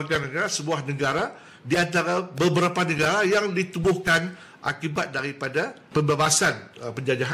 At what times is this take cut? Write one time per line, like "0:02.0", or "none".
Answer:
0:05.9